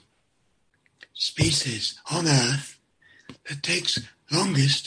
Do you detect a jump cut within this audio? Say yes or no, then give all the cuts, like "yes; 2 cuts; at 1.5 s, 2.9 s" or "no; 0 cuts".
no; 0 cuts